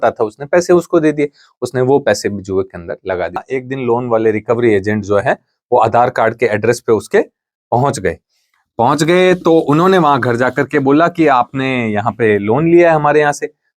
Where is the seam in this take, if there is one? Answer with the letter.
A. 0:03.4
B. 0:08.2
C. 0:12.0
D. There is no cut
A